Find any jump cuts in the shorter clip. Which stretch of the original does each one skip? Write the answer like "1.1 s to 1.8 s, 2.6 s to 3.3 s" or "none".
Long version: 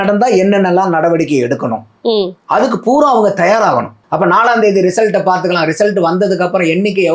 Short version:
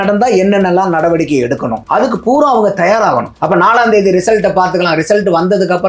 1.8 s to 2.4 s, 3.9 s to 4.0 s

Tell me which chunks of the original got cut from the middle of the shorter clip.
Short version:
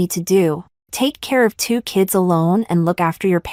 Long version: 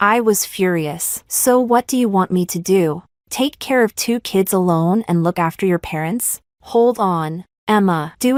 none

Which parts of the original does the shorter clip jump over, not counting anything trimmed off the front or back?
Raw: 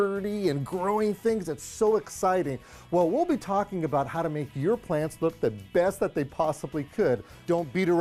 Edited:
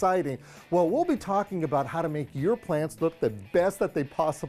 none

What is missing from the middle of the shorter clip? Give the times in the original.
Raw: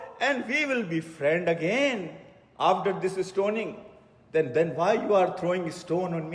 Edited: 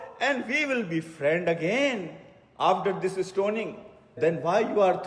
4.2 s to 4.5 s

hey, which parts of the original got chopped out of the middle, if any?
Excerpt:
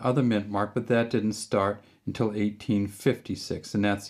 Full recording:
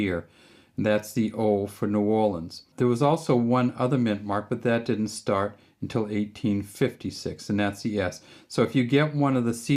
none

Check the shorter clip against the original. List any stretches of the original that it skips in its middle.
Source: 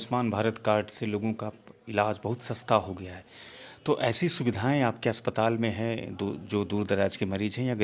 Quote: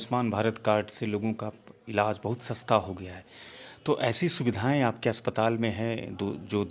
none

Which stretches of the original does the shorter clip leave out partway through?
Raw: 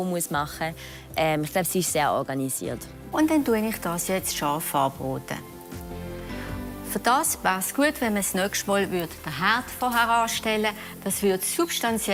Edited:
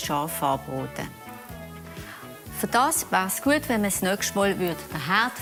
none

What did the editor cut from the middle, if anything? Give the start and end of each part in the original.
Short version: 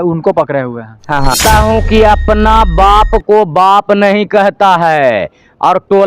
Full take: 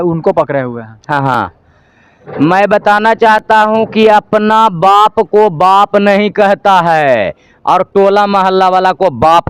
1.4 s to 3.4 s

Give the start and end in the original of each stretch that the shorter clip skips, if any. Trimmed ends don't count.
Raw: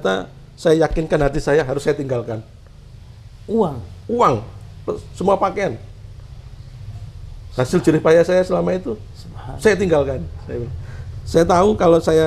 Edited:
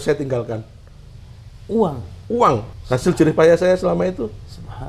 4.5 s to 7.4 s

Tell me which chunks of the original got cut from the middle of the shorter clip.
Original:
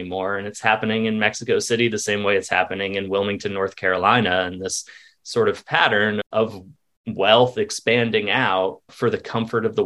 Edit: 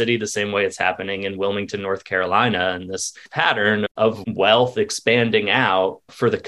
5.0 s to 5.6 s, 6.6 s to 7.0 s

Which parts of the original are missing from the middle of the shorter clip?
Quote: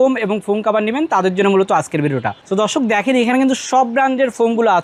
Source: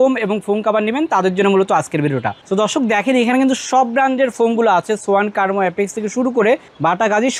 none

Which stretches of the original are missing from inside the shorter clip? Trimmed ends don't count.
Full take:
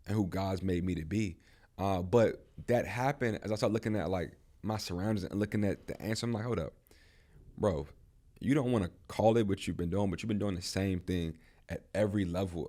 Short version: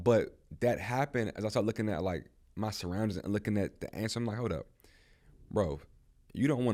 none

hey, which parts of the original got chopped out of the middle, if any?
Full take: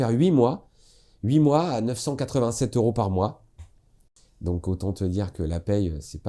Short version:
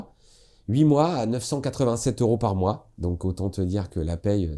3.4 s to 4.3 s

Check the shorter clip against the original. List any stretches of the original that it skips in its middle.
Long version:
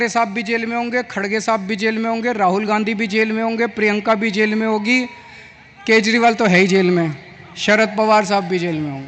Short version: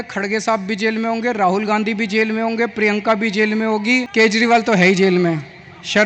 5.1 s to 5.8 s

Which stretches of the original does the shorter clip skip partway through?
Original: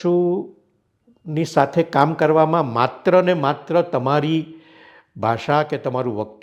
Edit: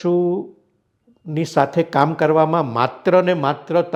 none

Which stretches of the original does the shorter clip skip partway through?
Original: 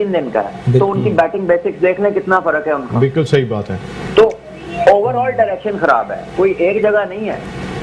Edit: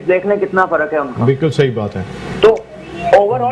none

